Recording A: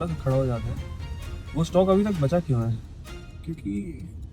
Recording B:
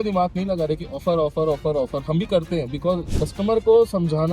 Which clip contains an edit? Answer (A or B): B